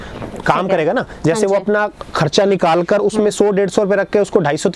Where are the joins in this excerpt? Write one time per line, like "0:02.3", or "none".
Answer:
none

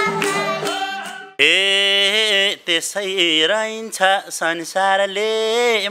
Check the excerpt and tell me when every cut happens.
0:01.4

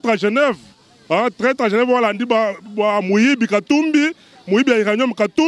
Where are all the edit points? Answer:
none

